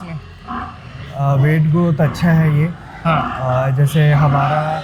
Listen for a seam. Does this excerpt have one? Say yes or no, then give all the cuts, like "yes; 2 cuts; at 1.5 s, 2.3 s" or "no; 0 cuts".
no; 0 cuts